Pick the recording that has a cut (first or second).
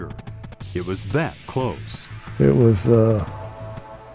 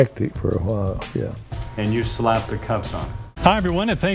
second